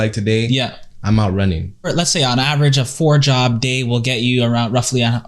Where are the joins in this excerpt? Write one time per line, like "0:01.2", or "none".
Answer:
0:01.9